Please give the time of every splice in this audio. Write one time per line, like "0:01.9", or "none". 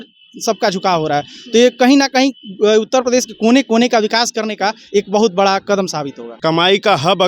0:06.4